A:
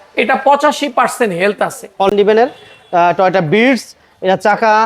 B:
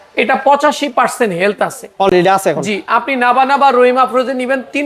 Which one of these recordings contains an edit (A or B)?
A